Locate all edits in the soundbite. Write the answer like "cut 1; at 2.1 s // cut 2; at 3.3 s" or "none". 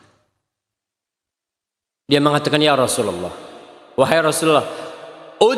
none